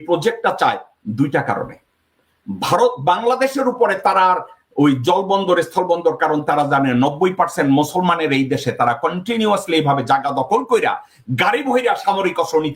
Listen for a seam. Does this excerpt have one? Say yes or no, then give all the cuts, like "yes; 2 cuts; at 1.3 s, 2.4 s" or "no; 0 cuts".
no; 0 cuts